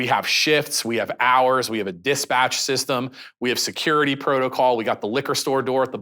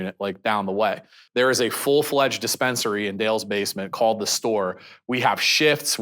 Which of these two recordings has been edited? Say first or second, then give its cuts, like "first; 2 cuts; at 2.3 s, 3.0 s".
second; 1 cut; at 1.2 s